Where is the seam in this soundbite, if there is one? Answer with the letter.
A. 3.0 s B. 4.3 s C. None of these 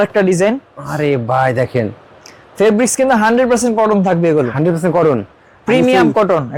C